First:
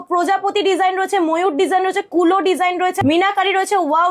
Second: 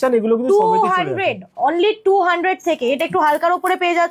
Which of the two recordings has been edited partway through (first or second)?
first